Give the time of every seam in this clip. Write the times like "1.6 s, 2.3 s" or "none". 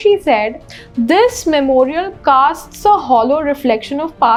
none